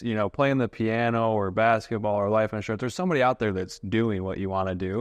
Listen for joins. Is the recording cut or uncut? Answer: uncut